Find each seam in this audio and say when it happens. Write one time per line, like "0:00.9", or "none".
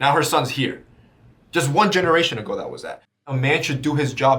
0:03.2